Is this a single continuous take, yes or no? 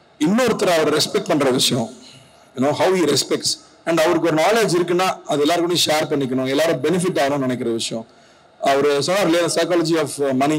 yes